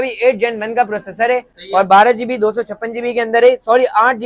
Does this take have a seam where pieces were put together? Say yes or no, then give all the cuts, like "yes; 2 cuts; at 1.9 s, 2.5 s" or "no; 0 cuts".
no; 0 cuts